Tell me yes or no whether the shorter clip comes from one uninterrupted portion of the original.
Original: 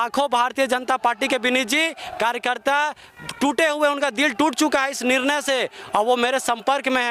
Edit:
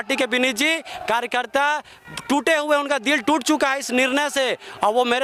yes